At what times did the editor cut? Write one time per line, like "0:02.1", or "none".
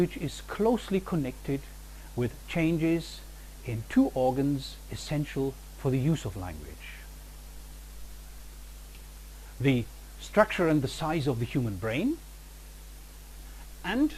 0:01.7

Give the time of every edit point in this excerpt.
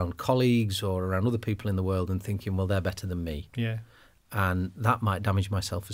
none

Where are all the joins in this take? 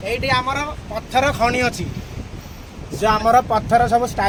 none

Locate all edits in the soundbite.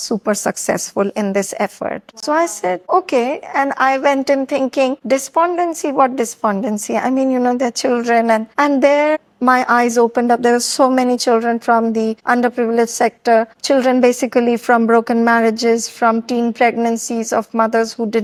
none

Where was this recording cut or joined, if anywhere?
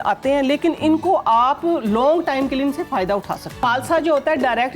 0:03.6

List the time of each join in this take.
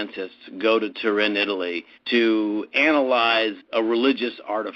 0:03.6

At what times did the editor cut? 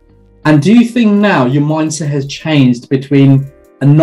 none

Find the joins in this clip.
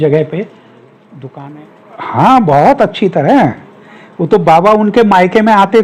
0:01.2

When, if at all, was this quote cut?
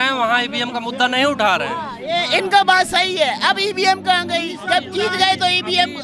none

